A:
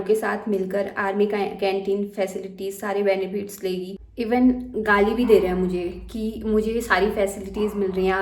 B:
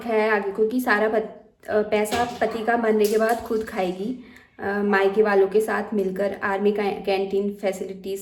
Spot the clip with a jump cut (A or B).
A